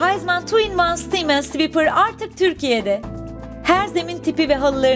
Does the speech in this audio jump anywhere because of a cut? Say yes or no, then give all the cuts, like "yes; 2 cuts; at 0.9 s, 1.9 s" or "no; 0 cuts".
no; 0 cuts